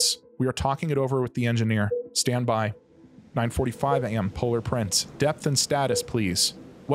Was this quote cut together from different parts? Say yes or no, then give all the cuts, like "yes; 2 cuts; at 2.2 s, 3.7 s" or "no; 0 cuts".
yes; 1 cut; at 2.6 s